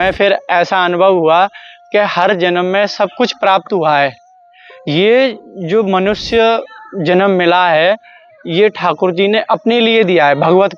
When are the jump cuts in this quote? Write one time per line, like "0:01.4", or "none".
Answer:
none